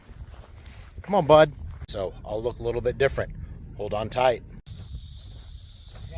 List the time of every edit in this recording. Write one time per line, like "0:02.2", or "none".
0:01.9
0:04.5